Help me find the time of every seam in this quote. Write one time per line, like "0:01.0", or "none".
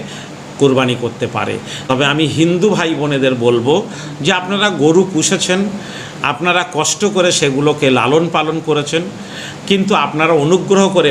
0:01.7